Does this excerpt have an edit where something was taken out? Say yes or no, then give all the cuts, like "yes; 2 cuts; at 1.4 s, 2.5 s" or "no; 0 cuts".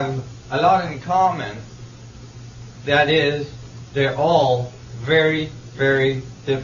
yes; 1 cut; at 5.6 s